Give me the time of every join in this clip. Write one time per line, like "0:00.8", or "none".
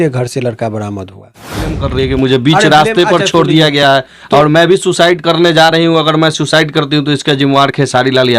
0:01.7